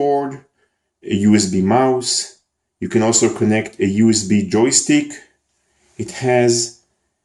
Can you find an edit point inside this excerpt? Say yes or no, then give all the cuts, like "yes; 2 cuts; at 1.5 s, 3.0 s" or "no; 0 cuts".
no; 0 cuts